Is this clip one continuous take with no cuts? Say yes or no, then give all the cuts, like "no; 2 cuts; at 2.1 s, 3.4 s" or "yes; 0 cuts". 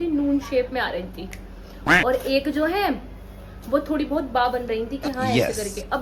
yes; 0 cuts